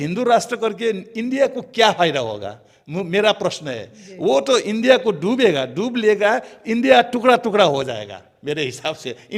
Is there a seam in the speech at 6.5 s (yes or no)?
no